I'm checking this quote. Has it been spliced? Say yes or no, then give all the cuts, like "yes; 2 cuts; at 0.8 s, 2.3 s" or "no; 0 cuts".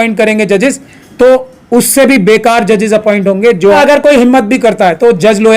yes; 1 cut; at 3.8 s